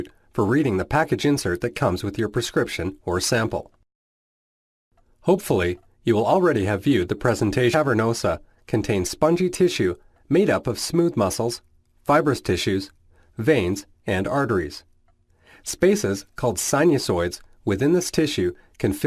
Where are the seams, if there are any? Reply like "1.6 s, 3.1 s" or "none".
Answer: none